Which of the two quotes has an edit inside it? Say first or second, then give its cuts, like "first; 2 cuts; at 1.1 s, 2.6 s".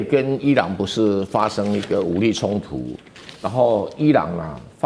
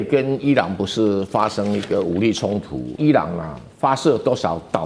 second; 1 cut; at 2.9 s